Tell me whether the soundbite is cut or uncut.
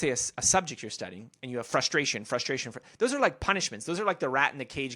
uncut